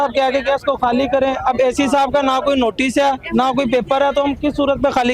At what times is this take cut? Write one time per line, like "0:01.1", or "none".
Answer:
none